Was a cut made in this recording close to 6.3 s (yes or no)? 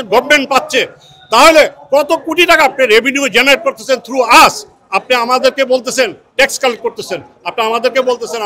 no